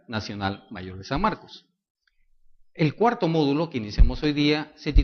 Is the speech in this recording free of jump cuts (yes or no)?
yes